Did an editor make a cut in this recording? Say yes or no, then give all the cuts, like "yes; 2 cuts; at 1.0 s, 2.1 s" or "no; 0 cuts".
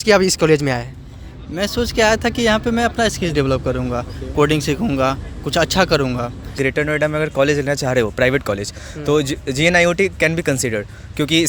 yes; 1 cut; at 6.5 s